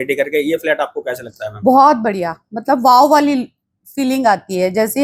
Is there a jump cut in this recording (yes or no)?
no